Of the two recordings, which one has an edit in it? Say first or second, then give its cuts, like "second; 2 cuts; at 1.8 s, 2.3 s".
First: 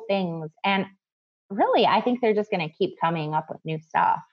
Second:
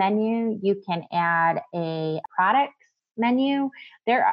second; 1 cut; at 2.2 s